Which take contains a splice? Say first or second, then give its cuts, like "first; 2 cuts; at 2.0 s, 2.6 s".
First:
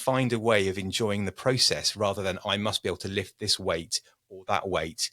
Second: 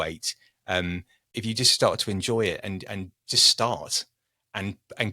second; 1 cut; at 1.3 s